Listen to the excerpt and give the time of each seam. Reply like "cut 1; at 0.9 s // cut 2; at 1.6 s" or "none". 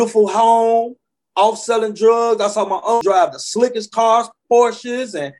cut 1; at 3.0 s

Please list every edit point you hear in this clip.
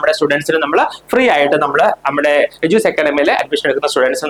none

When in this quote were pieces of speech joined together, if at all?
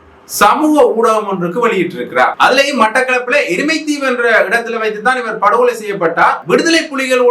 cut 1; at 2.3 s // cut 2; at 6.4 s

